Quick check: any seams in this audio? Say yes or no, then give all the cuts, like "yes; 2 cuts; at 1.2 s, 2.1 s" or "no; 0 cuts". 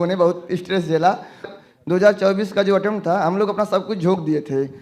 yes; 1 cut; at 1.5 s